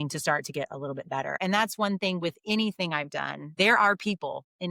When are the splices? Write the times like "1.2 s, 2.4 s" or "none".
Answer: 1.4 s, 3.4 s

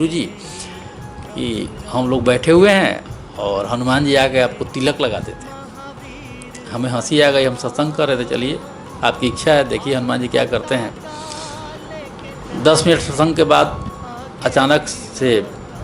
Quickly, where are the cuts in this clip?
none

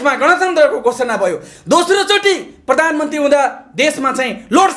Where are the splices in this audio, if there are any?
none

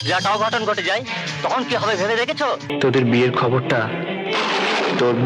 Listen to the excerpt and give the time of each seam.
2.7 s

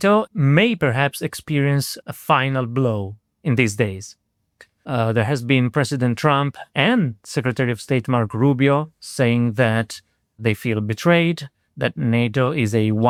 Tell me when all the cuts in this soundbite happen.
none

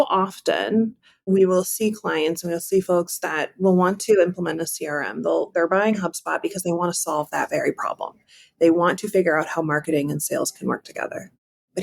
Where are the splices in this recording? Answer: 1.1 s

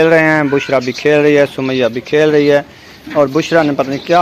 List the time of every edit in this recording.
none

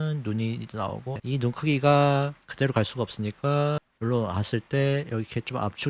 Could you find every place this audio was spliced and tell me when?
1.2 s

